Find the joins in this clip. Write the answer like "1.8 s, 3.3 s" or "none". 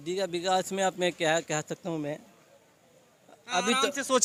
none